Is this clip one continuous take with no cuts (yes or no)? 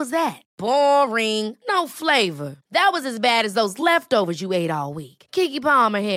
yes